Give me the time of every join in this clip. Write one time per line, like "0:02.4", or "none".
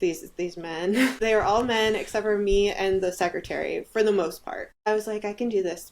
0:01.1
0:04.9